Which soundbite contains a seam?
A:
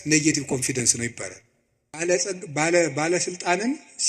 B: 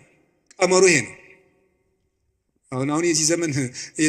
A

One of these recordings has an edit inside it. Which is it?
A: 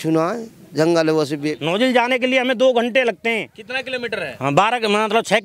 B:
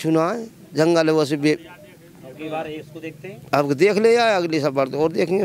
A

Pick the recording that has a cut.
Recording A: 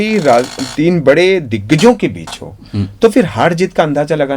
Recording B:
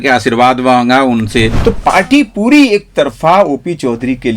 B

